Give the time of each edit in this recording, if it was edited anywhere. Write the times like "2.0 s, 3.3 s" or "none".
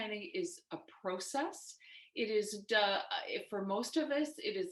none